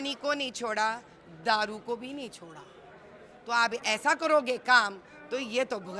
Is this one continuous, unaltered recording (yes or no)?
yes